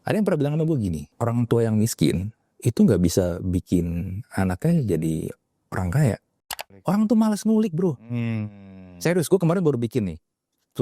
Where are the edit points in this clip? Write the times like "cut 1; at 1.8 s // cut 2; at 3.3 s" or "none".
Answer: cut 1; at 6.4 s